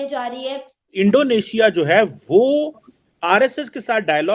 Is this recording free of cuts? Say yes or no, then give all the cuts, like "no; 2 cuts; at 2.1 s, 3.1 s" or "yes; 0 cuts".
no; 1 cut; at 0.9 s